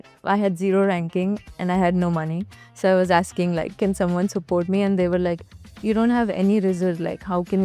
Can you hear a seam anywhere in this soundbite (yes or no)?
no